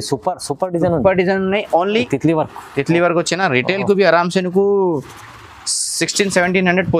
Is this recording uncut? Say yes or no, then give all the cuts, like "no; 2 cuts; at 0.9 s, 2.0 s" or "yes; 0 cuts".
no; 1 cut; at 2.1 s